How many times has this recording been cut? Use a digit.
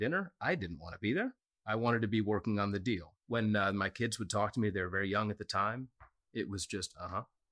1